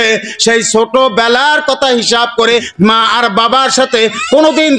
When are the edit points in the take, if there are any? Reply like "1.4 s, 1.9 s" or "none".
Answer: 2.7 s